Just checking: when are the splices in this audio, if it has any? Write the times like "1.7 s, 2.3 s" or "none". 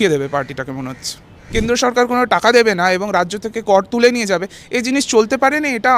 1.4 s